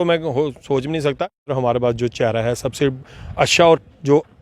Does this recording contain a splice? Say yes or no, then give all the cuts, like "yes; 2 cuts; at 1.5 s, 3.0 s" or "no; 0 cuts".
yes; 1 cut; at 1.4 s